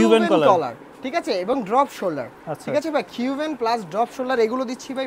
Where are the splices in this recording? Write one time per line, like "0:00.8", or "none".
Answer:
none